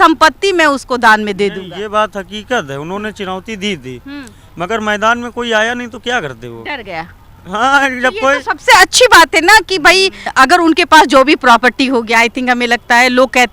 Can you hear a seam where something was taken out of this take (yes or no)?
no